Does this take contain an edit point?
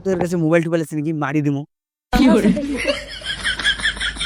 no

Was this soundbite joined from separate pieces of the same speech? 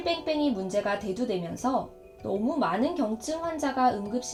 no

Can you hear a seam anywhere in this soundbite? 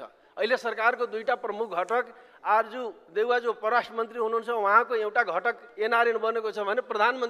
no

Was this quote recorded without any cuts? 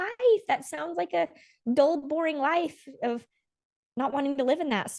yes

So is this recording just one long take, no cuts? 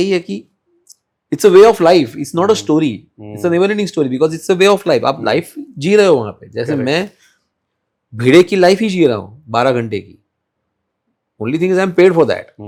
yes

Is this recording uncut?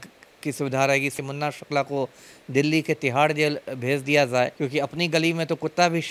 no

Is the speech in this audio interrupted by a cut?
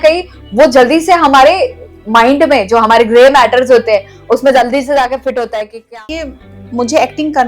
yes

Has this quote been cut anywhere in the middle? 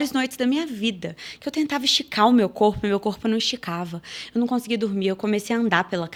no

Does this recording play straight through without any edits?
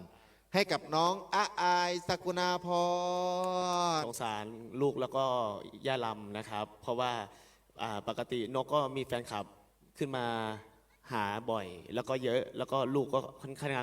no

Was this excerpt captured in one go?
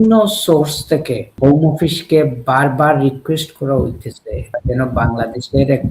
no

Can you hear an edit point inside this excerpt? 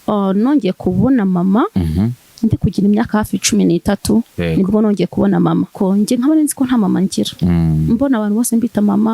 yes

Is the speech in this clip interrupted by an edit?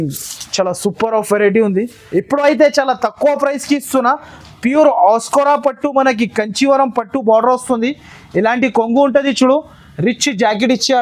yes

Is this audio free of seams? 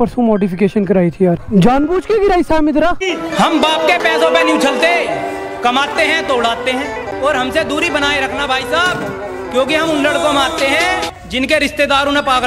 no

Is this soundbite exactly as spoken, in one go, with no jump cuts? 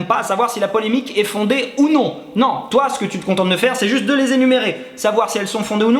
yes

